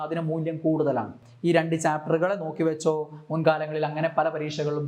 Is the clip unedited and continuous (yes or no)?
no